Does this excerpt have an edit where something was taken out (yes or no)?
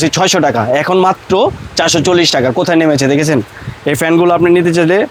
no